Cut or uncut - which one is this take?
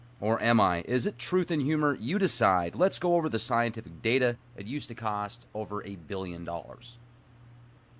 uncut